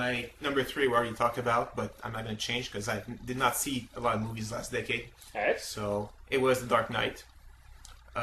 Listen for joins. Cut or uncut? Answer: cut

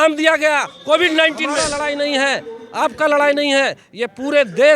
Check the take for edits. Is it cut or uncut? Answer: cut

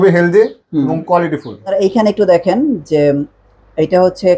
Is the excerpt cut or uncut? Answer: cut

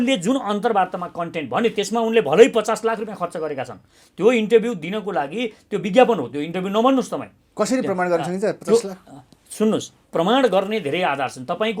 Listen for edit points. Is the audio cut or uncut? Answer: uncut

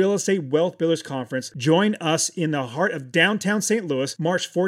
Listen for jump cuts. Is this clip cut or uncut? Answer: uncut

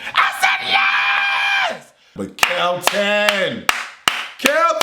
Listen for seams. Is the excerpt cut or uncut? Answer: cut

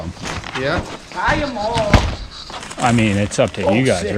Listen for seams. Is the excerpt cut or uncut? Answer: cut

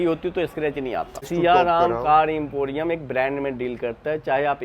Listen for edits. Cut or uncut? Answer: cut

